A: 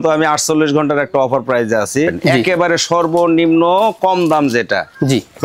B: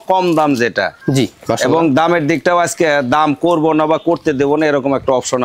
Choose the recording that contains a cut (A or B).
A